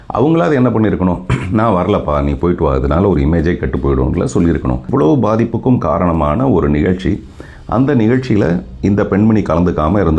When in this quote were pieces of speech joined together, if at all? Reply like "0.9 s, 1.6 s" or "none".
4.8 s